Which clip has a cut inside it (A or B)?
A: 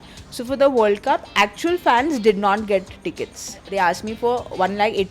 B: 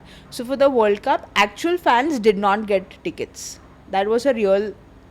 A